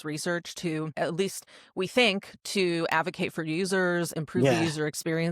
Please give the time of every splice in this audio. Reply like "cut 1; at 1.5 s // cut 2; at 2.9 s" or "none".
cut 1; at 0.9 s